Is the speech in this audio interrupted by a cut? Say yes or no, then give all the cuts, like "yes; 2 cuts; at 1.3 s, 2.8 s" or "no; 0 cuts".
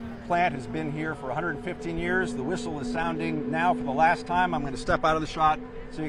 no; 0 cuts